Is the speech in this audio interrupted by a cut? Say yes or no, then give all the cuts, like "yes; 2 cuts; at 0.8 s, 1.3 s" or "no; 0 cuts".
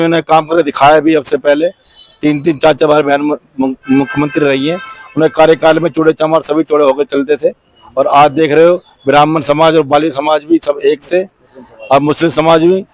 no; 0 cuts